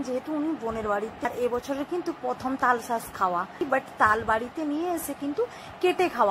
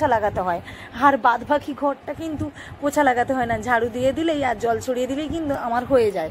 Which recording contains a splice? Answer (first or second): first